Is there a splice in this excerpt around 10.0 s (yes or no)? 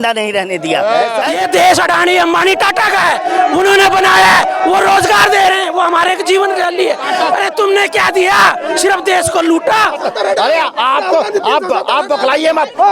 yes